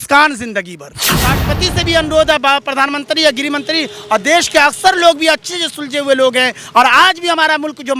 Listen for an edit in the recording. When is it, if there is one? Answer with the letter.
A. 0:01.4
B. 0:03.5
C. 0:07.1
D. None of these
A